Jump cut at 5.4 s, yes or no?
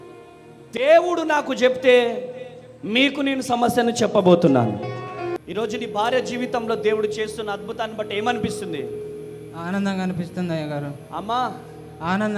yes